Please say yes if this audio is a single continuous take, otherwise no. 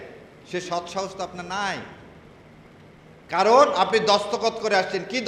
yes